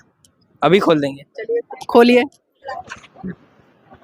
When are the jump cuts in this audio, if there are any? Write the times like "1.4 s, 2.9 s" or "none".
2.7 s